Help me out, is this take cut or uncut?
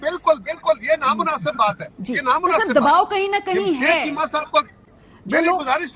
uncut